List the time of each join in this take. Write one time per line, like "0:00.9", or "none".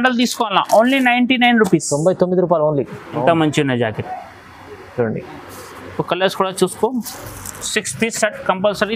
0:03.0